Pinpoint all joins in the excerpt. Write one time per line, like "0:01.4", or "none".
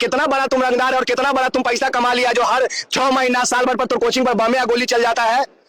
none